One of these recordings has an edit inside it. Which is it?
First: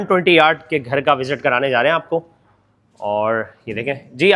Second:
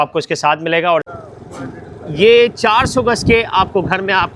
second; 1 cut; at 1.1 s

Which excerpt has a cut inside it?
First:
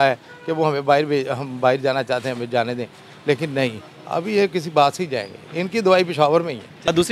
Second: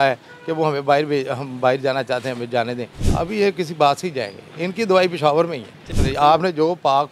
second; 2 cuts; at 3.0 s, 5.8 s

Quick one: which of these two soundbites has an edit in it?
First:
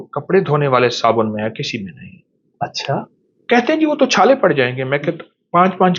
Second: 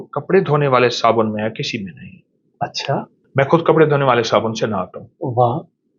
first; 1 cut; at 3.2 s

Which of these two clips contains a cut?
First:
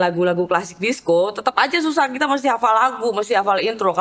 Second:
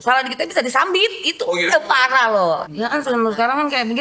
second; 1 cut; at 2.6 s

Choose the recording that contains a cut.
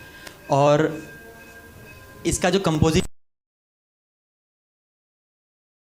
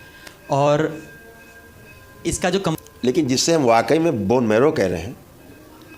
second; 1 cut; at 2.8 s

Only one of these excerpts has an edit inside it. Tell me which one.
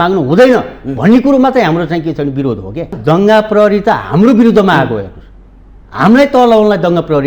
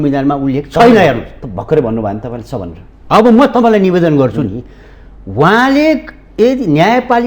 first; 1 cut; at 2.9 s

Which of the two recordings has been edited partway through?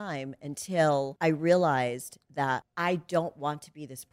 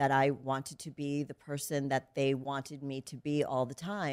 first; 2 cuts; at 1.1 s, 2.7 s

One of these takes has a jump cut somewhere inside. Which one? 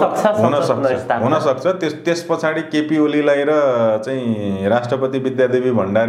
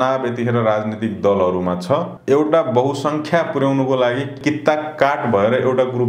second; 2 cuts; at 2.1 s, 4.3 s

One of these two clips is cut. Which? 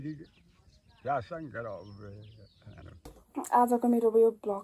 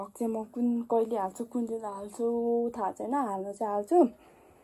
first; 1 cut; at 3.0 s

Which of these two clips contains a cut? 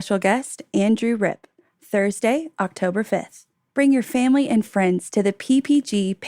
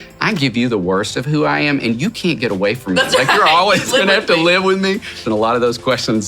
second; 1 cut; at 5.2 s

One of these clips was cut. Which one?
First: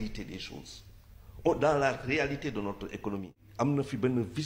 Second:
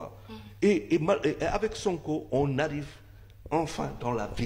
first; 1 cut; at 3.4 s

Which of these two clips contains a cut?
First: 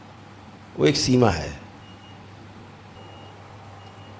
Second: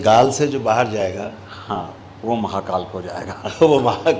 first; 1 cut; at 3.0 s

